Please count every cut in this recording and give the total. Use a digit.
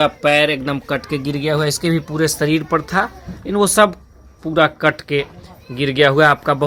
0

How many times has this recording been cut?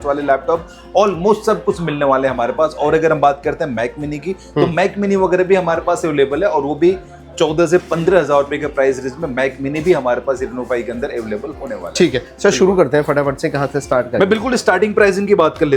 0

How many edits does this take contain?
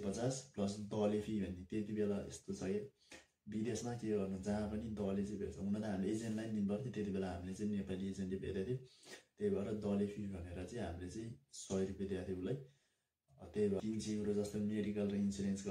1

